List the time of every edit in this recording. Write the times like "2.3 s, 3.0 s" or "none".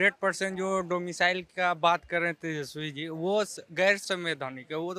4.0 s